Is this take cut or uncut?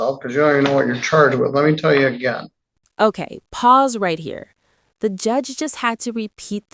uncut